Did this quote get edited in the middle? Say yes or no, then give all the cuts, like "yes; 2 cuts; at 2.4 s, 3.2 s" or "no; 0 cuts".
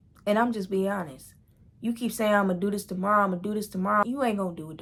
no; 0 cuts